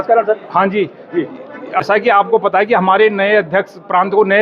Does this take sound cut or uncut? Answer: cut